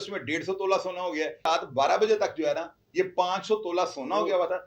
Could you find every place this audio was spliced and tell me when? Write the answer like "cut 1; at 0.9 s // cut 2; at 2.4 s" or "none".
cut 1; at 1.5 s